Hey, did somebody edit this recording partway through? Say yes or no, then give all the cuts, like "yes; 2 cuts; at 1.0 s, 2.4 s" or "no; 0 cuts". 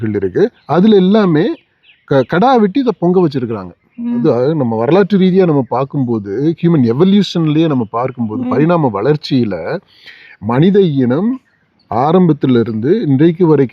yes; 1 cut; at 4.2 s